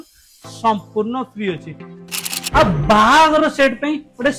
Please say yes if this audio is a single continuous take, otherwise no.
no